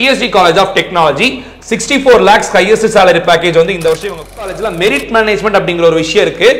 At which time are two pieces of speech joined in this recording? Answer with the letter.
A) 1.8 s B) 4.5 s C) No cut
B